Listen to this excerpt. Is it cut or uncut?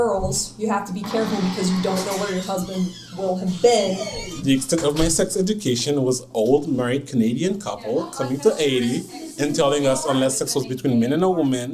cut